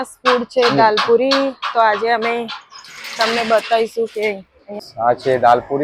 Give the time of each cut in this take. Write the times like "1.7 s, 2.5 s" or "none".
4.9 s